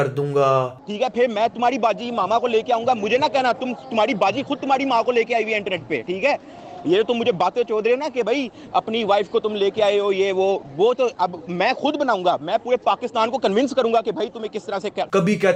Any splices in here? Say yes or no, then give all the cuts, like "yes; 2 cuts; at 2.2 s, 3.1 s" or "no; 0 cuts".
no; 0 cuts